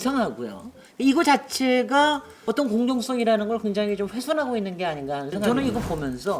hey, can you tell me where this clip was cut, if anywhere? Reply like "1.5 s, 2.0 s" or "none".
2.3 s, 5.5 s